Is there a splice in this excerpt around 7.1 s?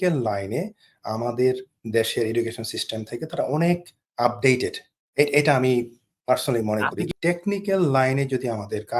yes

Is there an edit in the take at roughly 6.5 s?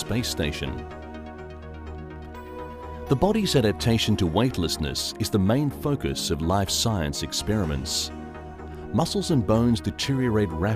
no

